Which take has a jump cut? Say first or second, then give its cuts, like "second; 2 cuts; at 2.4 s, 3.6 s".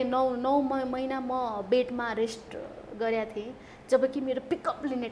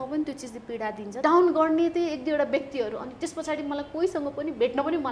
second; 1 cut; at 1.2 s